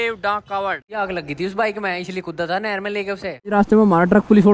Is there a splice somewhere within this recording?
yes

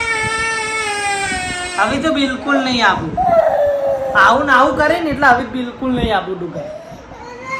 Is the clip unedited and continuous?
yes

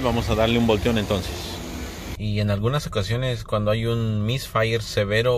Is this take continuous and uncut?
no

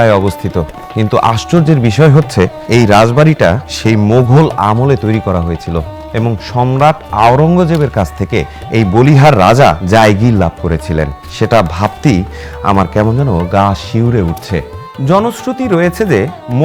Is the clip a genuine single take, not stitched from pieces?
no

